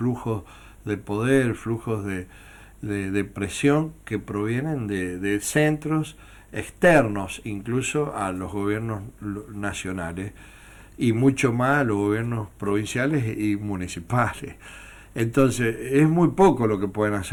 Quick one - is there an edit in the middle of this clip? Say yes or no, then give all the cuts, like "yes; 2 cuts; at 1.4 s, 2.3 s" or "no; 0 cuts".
no; 0 cuts